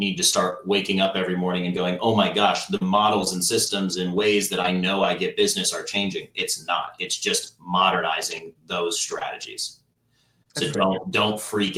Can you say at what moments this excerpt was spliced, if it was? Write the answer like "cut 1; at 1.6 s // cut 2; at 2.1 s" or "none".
none